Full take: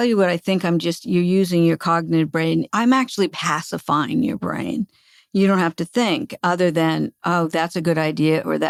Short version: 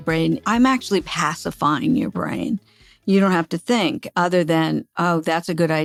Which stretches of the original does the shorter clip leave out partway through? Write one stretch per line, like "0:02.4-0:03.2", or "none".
none

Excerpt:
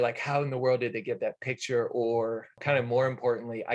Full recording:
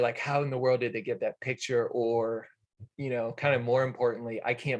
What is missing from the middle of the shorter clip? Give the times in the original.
0:02.6-0:03.3

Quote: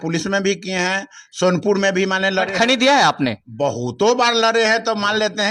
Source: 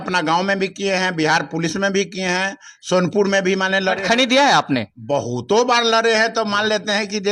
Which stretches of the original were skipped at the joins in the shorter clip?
none

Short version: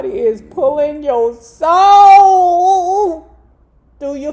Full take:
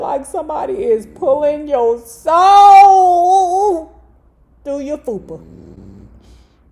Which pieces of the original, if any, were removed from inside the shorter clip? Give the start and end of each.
none

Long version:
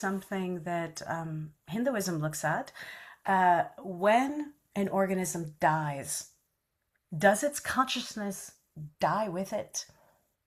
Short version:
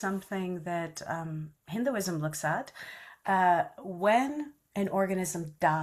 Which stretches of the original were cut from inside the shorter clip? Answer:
none

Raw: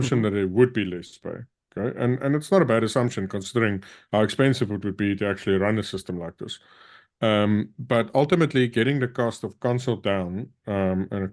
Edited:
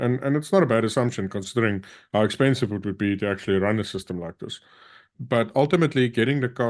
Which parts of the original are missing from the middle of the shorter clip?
0:07.1-0:07.7

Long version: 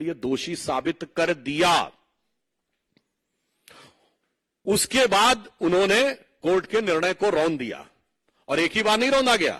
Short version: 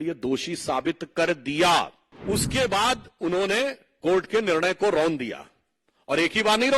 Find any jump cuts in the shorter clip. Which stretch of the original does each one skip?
0:02.0-0:04.4

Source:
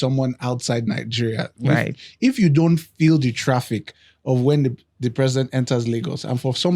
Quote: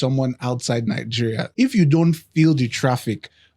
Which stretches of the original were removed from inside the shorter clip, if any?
0:01.5-0:02.1

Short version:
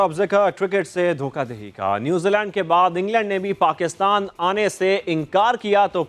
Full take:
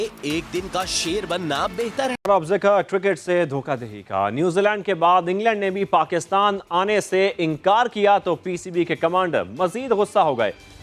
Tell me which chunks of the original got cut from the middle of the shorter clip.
none

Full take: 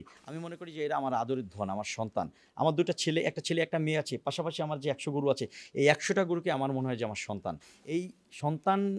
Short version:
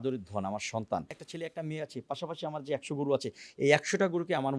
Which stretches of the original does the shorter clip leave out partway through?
0:02.4-0:03.4

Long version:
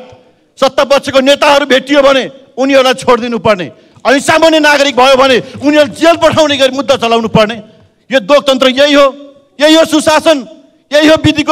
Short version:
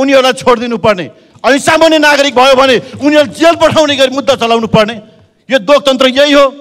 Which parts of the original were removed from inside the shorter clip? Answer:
none

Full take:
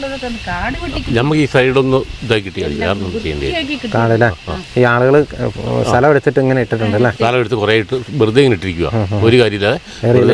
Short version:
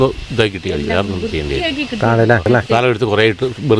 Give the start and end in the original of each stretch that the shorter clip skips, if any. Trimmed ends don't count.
0:04.3-0:06.9

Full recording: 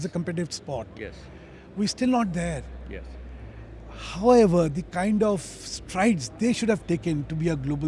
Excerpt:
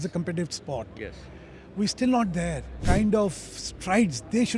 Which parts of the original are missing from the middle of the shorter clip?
0:02.8-0:04.8

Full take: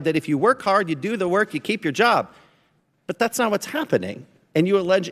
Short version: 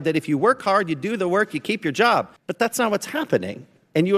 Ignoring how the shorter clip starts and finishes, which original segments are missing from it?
0:02.4-0:03.0

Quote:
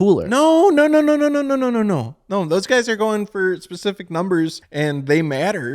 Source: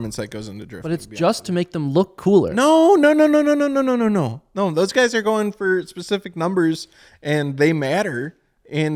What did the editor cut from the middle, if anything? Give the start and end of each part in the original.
0:06.9-0:07.1

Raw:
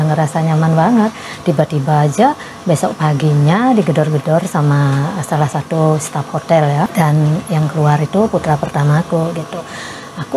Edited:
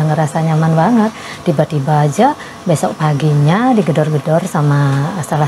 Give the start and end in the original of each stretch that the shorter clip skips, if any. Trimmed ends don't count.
none

